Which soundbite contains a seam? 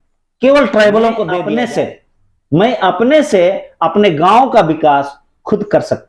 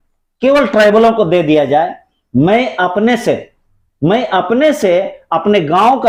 first; 1 cut; at 1.4 s

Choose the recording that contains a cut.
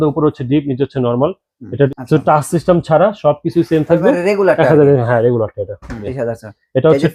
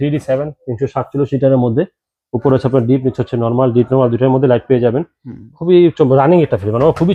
first; 2 cuts; at 1.9 s, 6.1 s

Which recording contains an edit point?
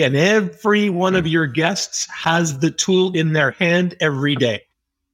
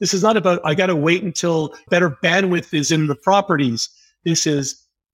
second; 1 cut; at 1.9 s

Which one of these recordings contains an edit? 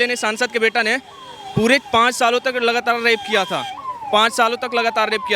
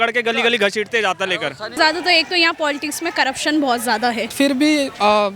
second; 2 cuts; at 1.8 s, 4.3 s

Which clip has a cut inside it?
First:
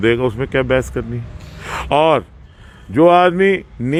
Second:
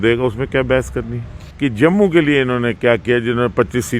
second; 1 cut; at 1.4 s

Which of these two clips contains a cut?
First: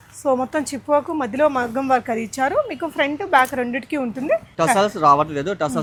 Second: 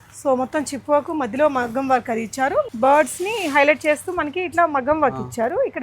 second; 1 cut; at 2.7 s

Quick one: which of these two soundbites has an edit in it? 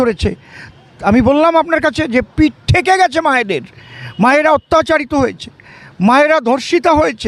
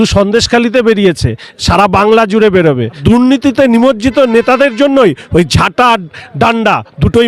second; 1 cut; at 3.0 s

